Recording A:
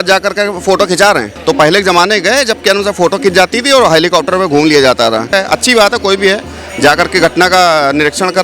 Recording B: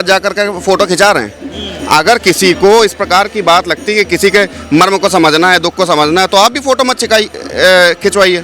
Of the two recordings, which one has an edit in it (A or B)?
A